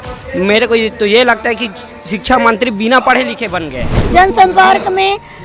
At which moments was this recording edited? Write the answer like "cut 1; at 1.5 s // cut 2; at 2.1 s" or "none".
cut 1; at 4.0 s